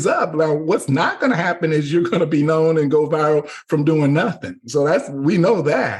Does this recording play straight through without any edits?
yes; 0 cuts

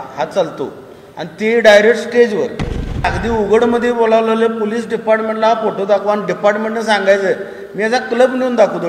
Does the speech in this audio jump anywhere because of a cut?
yes; 1 cut; at 3.1 s

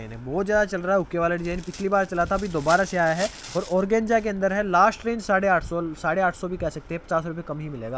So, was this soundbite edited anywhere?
no; 0 cuts

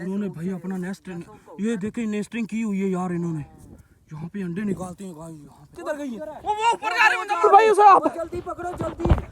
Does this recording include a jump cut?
yes; 1 cut; at 5.8 s

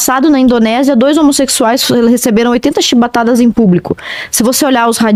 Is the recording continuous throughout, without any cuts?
yes; 0 cuts

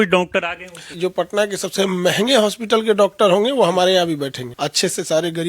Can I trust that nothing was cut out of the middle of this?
no; 2 cuts; at 0.9 s, 4.4 s

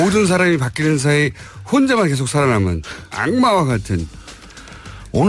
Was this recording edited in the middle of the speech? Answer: no; 0 cuts

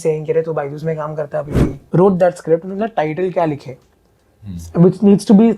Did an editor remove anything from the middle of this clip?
yes; 1 cut; at 1.7 s

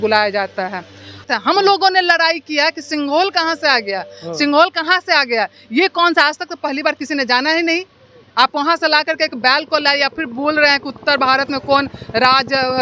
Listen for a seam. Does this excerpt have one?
yes; 1 cut; at 1.2 s

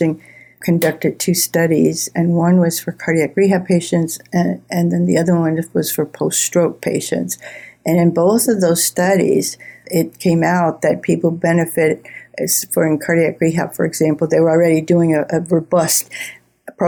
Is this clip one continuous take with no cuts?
yes; 0 cuts

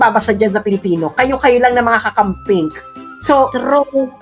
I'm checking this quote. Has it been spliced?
no; 0 cuts

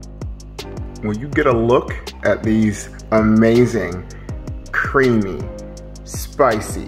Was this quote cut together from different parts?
yes; 1 cut; at 1.0 s

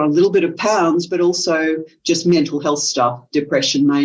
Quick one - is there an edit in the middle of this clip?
no; 0 cuts

